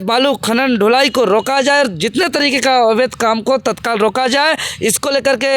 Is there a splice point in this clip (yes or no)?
no